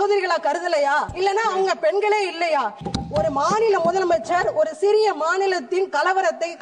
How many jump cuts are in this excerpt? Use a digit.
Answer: 2